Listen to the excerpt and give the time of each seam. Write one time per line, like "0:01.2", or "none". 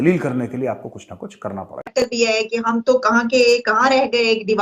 0:02.0